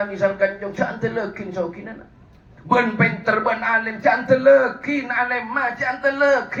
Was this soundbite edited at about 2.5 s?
no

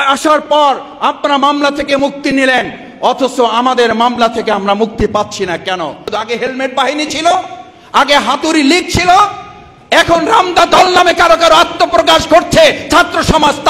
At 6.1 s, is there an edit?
yes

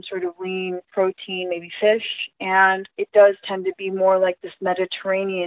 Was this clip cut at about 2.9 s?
yes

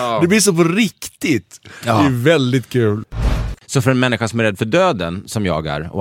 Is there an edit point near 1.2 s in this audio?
no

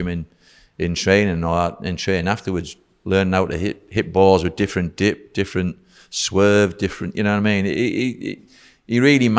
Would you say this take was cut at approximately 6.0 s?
no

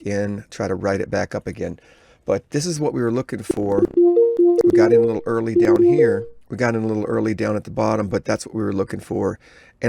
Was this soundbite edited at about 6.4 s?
yes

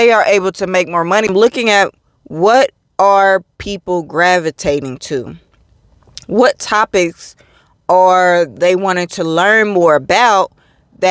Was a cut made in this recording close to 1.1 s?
yes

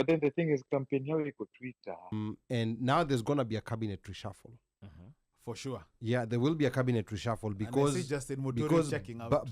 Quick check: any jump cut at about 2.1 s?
yes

